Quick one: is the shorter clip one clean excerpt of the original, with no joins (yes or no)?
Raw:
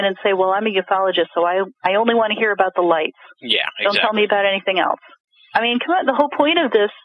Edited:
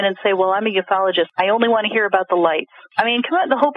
no